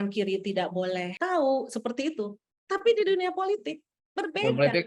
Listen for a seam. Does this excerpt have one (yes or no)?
yes